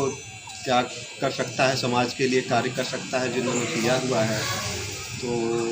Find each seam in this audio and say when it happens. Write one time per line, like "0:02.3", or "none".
none

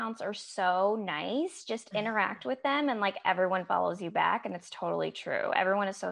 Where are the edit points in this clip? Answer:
none

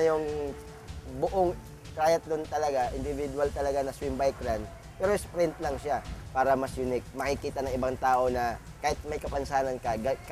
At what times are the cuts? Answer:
0:06.2
0:08.7

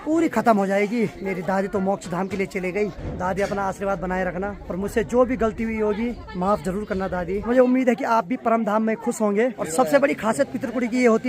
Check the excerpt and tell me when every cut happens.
0:01.2
0:03.0
0:04.6
0:06.2
0:07.4
0:09.6

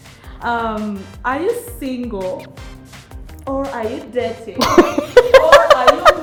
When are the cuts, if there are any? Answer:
none

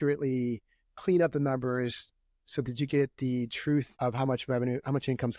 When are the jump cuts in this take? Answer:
0:03.9

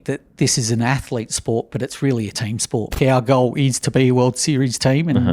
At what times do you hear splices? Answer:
0:03.0

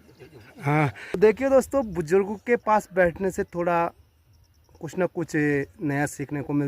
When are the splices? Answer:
0:01.2

